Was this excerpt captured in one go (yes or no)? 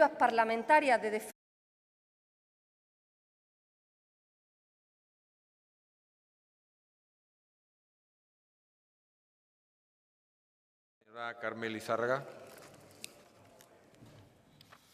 yes